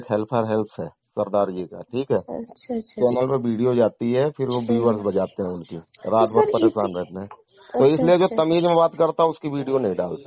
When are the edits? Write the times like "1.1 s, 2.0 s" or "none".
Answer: 2.9 s